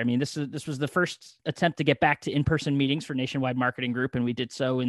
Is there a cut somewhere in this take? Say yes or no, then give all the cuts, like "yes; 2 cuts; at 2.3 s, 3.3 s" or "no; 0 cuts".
yes; 1 cut; at 1.3 s